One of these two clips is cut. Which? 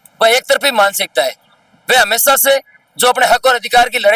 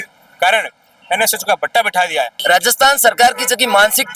second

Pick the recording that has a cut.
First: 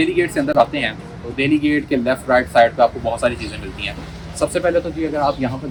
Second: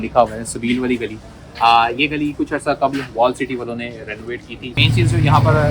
second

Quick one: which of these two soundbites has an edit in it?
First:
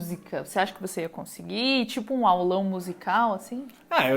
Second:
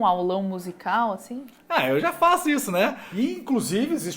second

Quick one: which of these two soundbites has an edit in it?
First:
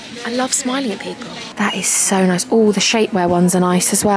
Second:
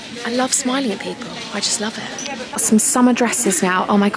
first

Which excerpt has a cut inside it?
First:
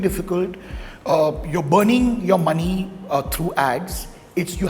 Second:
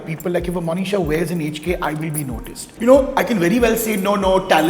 second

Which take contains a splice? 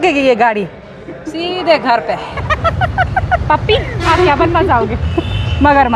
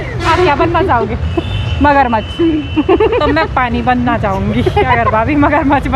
first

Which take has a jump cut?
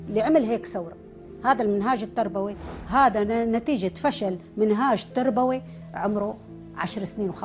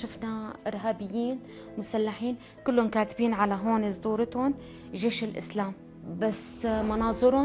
second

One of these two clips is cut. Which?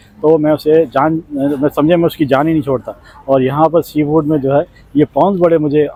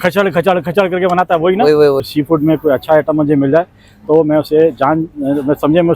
second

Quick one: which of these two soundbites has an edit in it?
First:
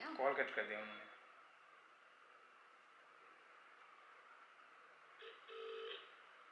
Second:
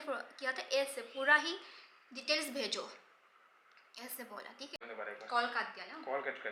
second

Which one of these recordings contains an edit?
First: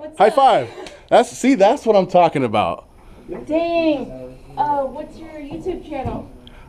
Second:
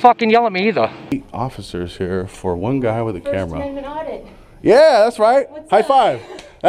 second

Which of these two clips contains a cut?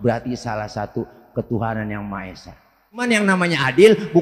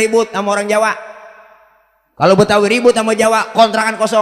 first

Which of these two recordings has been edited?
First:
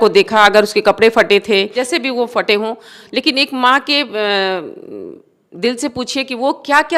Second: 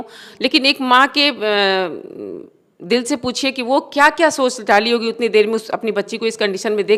first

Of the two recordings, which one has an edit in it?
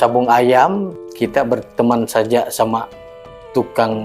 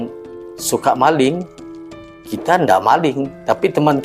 first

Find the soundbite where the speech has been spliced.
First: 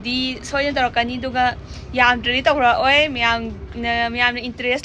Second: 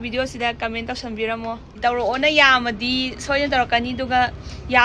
second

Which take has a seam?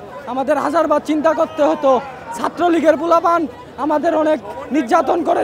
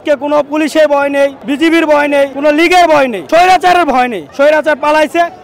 second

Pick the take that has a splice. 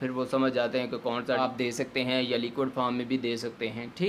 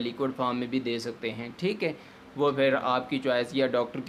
first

